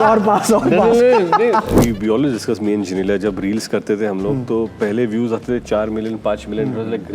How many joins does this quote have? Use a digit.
1